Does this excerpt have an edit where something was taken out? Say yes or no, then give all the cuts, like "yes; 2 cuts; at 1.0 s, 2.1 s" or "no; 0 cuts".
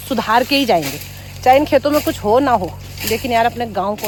no; 0 cuts